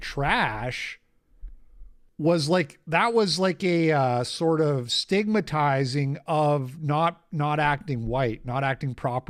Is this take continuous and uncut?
yes; 0 cuts

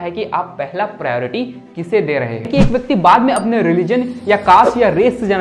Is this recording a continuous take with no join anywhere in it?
no; 1 cut; at 2.5 s

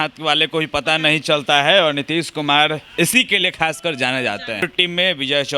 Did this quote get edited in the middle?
yes; 1 cut; at 4.6 s

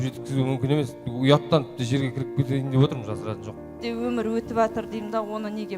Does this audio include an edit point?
yes; 1 cut; at 3.7 s

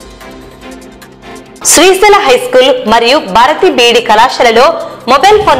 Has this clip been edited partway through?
yes; 1 cut; at 1.5 s

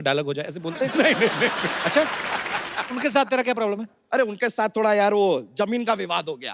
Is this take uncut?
no; 1 cut; at 2.7 s

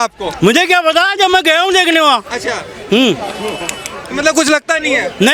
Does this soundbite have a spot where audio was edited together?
no; 0 cuts

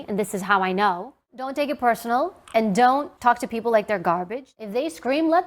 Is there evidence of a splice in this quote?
yes; 3 cuts; at 1.3 s, 3.1 s, 4.4 s

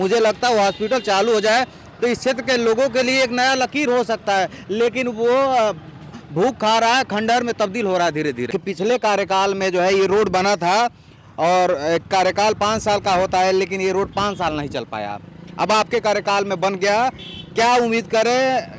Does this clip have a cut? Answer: yes; 1 cut; at 8.5 s

